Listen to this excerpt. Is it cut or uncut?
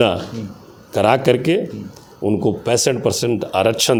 uncut